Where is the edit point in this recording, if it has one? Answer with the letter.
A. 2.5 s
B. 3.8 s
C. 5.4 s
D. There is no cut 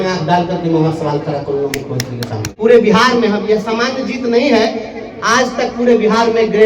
A